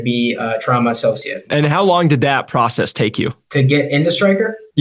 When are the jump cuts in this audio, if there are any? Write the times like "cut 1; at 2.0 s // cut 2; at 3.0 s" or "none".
cut 1; at 1.5 s